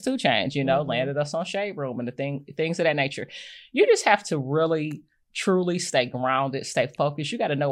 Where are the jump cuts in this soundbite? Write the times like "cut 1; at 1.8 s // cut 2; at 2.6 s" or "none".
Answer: none